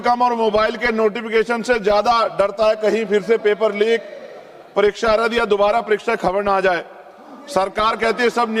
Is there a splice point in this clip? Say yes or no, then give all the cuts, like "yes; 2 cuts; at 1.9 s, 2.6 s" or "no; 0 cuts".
no; 0 cuts